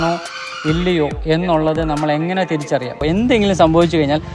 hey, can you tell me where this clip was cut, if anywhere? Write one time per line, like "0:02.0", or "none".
0:03.0